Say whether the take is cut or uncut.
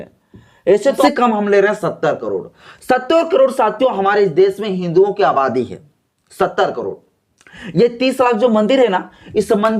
cut